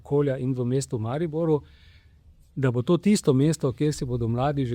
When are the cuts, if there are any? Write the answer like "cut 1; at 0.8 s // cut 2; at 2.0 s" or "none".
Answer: none